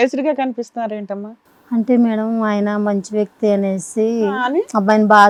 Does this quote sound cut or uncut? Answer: uncut